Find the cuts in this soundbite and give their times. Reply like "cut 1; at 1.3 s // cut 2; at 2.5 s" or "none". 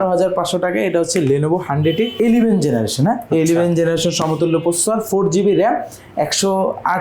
cut 1; at 2.1 s